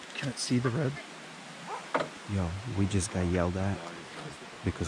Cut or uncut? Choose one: uncut